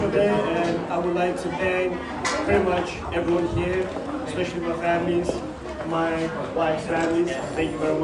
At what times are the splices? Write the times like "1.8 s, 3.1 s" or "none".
none